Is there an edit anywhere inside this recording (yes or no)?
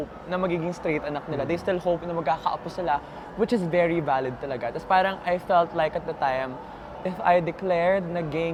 no